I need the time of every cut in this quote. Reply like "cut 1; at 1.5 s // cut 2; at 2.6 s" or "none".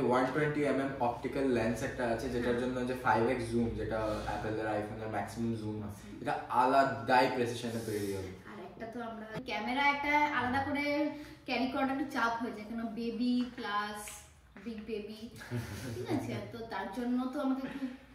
cut 1; at 9.4 s